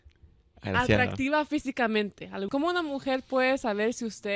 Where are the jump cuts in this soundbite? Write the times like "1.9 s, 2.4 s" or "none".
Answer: 2.5 s